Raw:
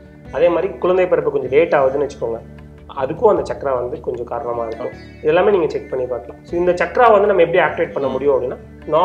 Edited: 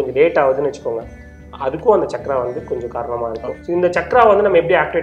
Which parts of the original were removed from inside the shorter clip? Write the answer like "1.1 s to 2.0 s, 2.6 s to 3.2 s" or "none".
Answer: 4.9 s to 6.4 s

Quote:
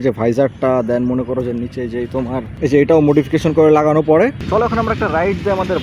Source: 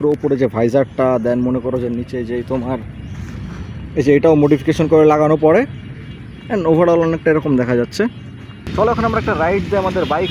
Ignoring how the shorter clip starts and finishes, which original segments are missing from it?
2.9 s to 3.9 s, 5.7 s to 8.7 s

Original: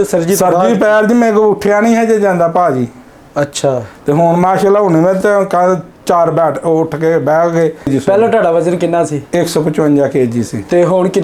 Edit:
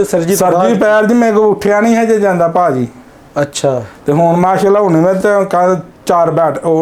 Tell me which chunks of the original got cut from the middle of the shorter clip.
none

